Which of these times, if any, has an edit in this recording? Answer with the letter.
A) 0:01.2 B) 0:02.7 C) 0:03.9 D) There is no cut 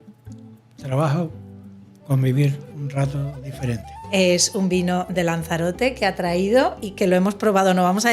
C